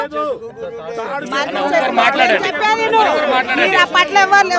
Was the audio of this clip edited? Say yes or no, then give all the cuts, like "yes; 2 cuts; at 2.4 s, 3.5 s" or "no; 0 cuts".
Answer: no; 0 cuts